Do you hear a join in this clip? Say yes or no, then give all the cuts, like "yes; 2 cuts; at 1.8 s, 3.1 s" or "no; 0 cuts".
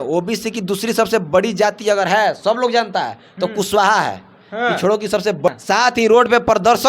yes; 1 cut; at 5.5 s